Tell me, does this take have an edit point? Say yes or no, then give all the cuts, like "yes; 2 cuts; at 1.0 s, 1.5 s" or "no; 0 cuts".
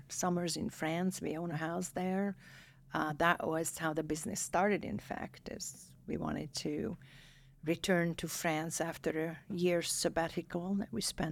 no; 0 cuts